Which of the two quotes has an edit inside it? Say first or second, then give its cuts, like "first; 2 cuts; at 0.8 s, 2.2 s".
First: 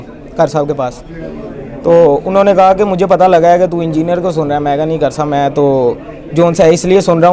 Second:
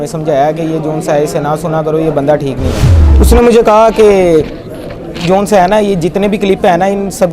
second; 1 cut; at 3.0 s